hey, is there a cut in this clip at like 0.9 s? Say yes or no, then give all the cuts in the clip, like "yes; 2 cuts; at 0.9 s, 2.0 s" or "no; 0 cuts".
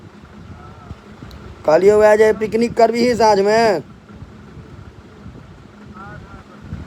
no; 0 cuts